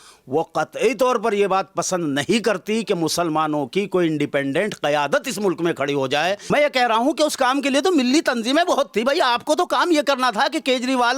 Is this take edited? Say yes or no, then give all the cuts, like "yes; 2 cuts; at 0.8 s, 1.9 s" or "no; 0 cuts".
yes; 1 cut; at 6.4 s